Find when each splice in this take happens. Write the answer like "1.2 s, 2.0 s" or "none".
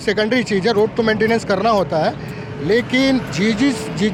none